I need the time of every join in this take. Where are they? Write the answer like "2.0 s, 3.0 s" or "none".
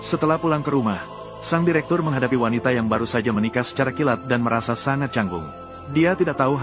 none